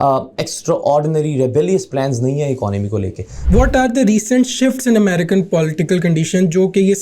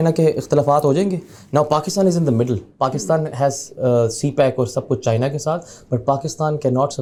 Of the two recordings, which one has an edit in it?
first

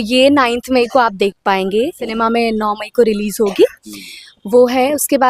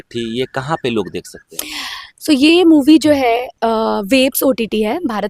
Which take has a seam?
first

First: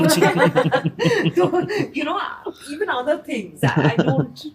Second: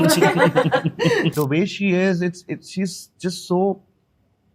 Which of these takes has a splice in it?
second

